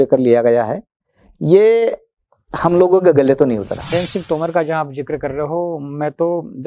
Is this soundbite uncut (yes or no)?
no